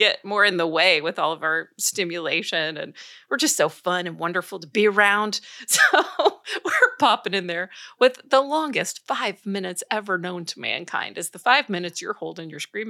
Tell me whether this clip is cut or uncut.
uncut